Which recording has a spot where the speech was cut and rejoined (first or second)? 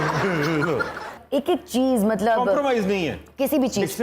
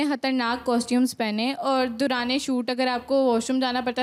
first